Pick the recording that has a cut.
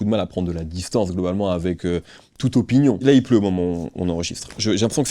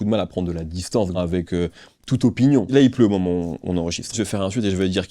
second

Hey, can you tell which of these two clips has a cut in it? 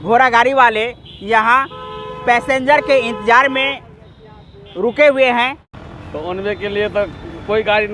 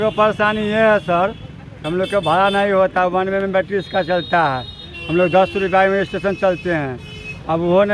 first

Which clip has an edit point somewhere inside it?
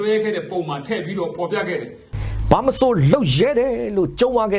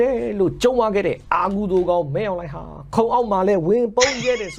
first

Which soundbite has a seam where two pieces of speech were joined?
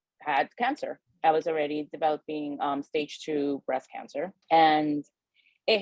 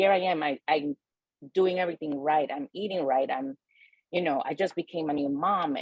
first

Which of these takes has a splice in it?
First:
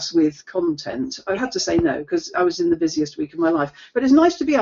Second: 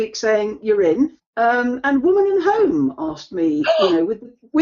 second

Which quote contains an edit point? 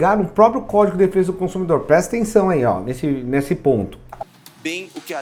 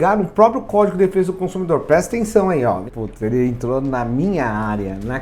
second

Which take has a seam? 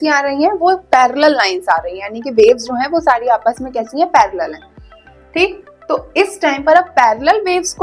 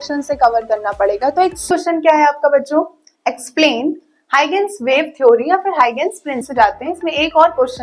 second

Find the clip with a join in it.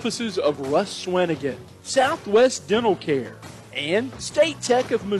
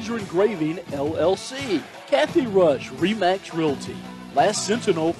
second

